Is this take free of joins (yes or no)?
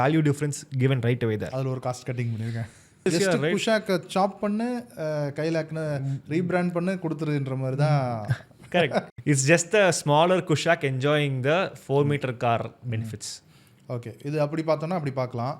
no